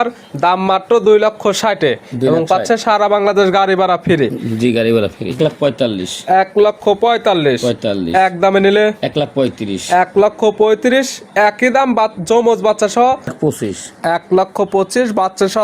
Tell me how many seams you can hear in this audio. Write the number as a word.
two